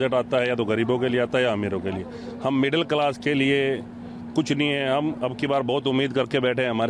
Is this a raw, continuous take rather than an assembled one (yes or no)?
yes